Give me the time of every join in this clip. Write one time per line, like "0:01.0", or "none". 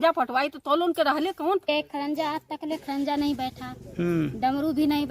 0:01.7